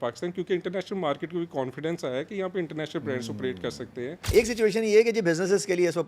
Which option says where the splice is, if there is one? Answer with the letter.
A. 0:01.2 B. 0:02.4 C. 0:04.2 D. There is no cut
C